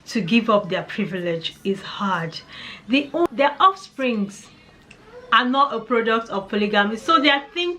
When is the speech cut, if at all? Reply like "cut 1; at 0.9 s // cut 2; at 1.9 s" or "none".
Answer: cut 1; at 3.3 s